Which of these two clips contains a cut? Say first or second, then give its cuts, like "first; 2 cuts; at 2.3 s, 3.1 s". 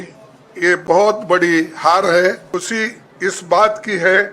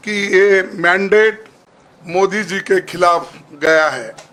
first; 1 cut; at 2.5 s